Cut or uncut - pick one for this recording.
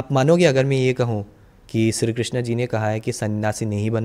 uncut